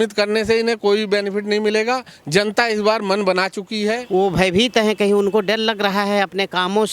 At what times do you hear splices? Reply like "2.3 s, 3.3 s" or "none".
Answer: 4.1 s